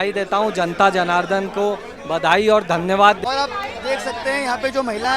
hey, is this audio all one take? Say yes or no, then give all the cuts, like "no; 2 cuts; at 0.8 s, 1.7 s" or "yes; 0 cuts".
no; 1 cut; at 3.2 s